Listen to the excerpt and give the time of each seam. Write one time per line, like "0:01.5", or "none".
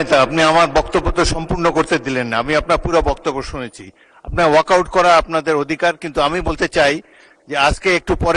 none